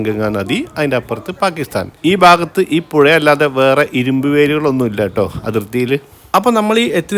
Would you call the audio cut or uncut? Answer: cut